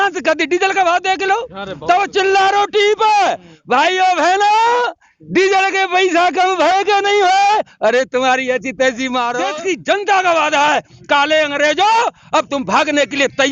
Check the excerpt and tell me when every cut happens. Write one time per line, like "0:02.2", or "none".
0:09.5